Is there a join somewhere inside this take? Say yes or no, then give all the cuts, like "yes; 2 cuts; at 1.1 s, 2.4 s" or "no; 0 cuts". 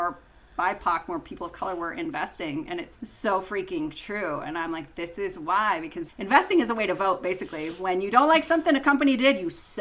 no; 0 cuts